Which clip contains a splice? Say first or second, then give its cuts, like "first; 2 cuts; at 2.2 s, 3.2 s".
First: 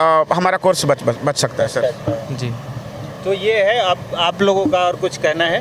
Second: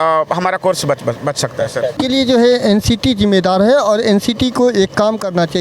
second; 1 cut; at 2.0 s